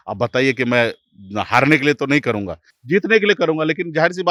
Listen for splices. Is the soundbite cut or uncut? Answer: uncut